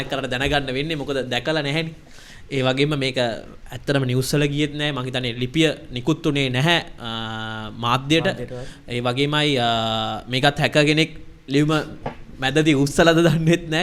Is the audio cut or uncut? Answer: uncut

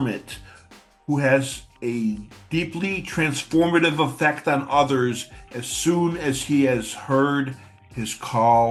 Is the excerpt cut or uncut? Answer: uncut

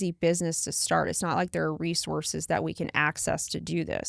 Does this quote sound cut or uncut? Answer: uncut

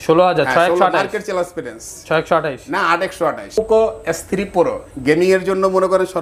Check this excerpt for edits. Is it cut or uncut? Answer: cut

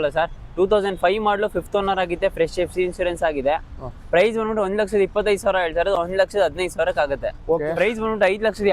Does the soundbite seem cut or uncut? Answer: cut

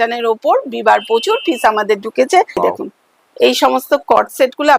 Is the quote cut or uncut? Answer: cut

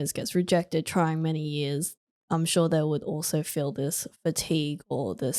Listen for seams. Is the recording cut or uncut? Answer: uncut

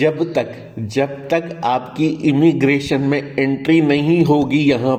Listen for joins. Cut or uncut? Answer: uncut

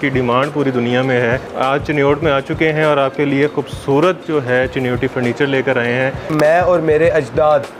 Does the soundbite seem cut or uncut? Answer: cut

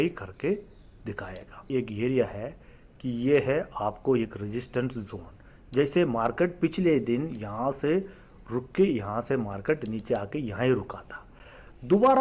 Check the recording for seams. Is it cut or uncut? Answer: cut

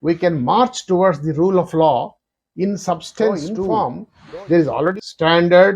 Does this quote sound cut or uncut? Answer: cut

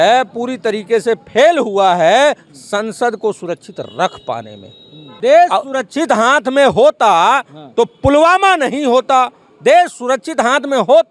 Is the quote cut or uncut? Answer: cut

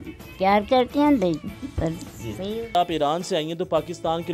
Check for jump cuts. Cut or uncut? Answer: cut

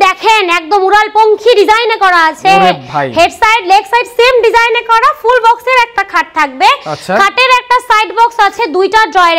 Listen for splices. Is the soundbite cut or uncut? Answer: uncut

